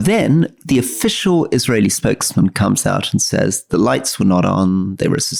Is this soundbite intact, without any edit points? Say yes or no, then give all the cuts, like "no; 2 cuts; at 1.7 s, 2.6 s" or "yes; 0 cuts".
yes; 0 cuts